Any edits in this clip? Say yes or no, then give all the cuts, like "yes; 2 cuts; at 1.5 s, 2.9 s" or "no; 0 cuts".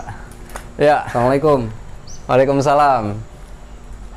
no; 0 cuts